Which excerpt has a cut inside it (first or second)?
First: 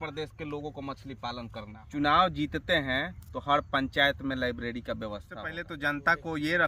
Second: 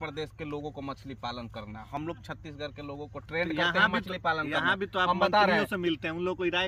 first